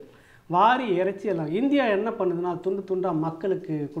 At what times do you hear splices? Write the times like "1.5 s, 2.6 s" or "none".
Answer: none

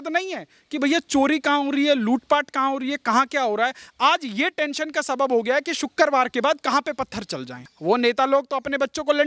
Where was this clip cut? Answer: 7.7 s

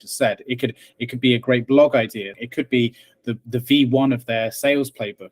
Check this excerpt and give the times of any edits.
2.4 s

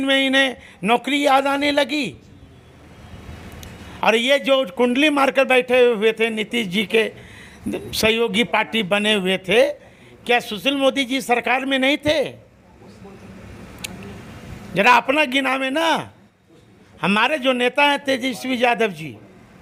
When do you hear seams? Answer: none

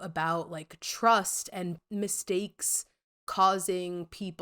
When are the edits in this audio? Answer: 1.8 s

